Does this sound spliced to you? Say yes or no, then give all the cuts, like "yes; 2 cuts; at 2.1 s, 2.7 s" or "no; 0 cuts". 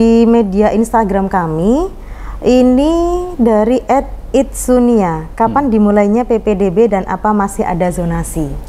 no; 0 cuts